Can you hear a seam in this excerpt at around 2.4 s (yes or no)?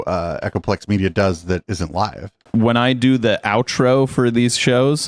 yes